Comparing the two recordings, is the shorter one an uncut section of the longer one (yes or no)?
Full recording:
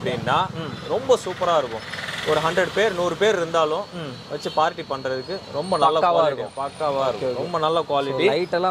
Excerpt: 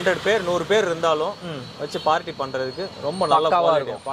yes